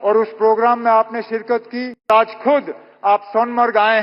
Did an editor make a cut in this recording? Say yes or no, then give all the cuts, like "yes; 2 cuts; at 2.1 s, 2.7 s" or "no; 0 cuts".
yes; 1 cut; at 2.1 s